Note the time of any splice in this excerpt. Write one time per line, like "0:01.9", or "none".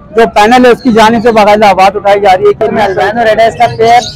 0:02.7